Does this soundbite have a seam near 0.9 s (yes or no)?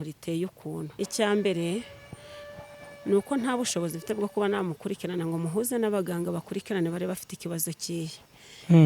yes